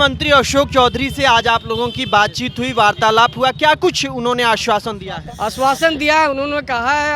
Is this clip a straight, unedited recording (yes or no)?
yes